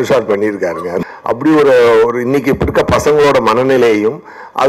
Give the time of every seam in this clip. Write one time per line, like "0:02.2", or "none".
0:01.0